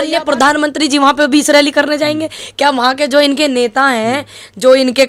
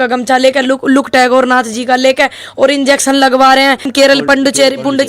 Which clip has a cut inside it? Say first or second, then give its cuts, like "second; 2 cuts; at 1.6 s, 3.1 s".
second; 1 cut; at 3.9 s